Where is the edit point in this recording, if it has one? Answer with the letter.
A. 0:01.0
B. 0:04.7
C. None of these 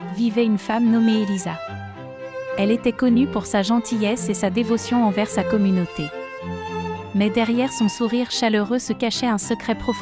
C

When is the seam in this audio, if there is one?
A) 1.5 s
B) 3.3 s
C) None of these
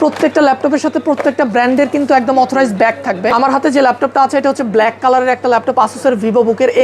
B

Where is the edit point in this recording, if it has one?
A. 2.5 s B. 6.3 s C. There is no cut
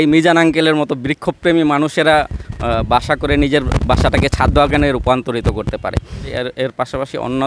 B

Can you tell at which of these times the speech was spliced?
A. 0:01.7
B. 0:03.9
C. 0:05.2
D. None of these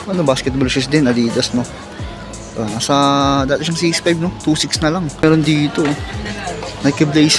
C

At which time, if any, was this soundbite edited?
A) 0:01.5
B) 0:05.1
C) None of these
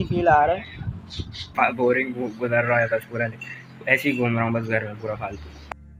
A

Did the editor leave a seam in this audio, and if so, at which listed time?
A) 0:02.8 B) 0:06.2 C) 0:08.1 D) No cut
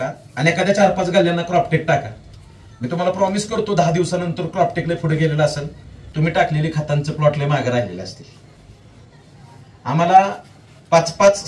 D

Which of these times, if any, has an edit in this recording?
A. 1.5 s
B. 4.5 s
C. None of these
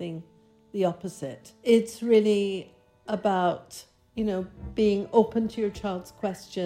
A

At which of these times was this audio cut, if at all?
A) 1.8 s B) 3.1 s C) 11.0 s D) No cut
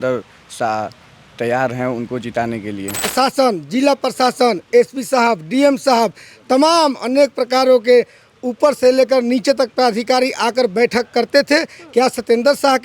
B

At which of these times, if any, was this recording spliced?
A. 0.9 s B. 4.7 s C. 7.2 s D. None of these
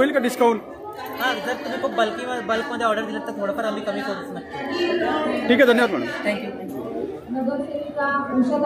C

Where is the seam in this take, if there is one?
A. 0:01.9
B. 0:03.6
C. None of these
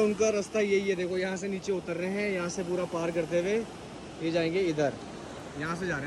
C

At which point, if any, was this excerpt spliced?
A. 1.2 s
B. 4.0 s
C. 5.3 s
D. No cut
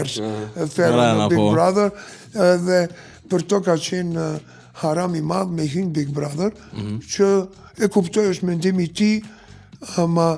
D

